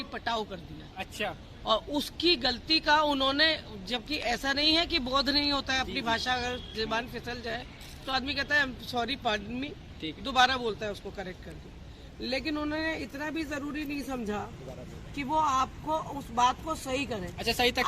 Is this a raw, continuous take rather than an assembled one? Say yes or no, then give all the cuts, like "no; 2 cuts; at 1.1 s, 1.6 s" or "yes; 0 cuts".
yes; 0 cuts